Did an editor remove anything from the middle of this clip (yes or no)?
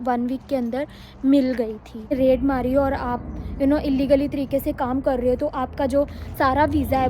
yes